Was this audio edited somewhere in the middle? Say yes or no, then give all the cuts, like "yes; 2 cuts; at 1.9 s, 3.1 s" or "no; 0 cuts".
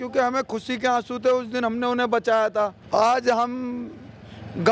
yes; 1 cut; at 2.8 s